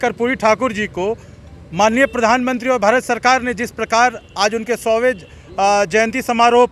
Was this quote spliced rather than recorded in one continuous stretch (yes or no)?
no